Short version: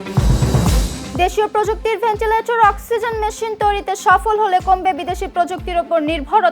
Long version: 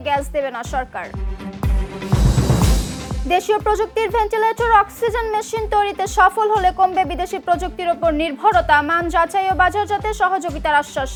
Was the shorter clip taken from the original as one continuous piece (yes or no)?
no